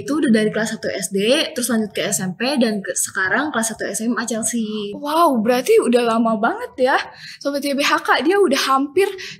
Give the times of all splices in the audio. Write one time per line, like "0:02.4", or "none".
none